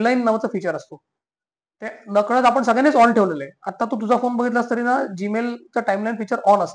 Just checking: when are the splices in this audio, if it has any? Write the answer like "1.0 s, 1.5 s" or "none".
none